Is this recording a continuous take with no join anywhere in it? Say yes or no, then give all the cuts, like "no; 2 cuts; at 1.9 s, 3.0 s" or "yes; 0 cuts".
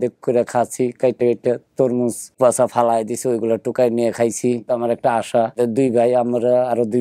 no; 3 cuts; at 2.3 s, 4.7 s, 5.6 s